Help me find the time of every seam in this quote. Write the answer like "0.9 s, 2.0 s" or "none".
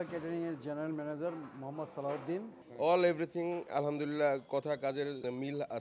2.6 s